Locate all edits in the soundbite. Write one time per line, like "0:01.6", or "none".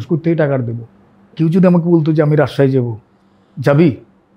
0:01.3